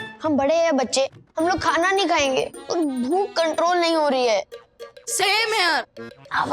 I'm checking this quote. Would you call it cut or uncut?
uncut